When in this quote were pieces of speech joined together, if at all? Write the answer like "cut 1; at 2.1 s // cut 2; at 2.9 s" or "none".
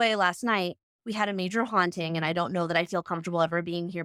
none